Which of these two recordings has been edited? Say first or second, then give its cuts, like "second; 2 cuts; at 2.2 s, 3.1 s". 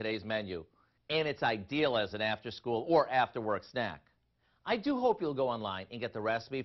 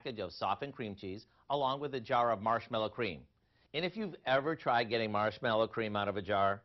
second; 1 cut; at 2.1 s